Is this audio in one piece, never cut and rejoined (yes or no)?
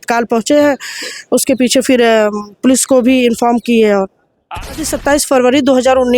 no